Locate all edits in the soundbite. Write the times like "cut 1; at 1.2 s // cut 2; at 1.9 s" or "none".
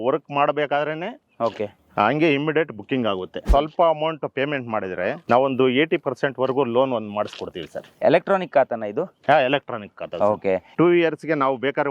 cut 1; at 3.5 s // cut 2; at 5.2 s // cut 3; at 8.0 s // cut 4; at 10.7 s

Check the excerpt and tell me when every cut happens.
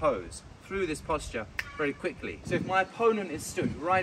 cut 1; at 2.3 s

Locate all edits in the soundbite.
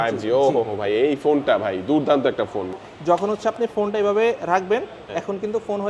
cut 1; at 2.7 s

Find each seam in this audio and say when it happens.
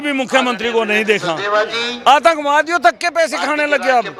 none

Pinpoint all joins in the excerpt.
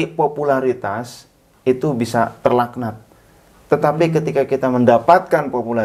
none

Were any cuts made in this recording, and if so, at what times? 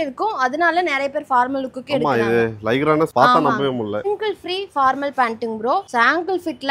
cut 1; at 3.1 s // cut 2; at 4.1 s // cut 3; at 5.9 s

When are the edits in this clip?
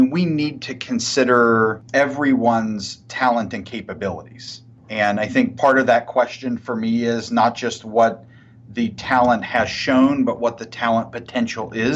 cut 1; at 1.8 s

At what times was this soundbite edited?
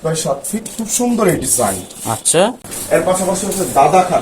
cut 1; at 2.7 s

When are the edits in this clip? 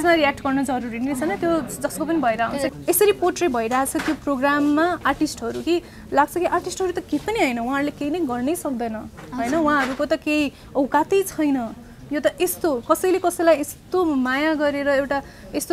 cut 1; at 2.7 s

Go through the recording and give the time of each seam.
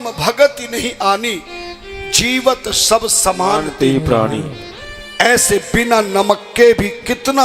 none

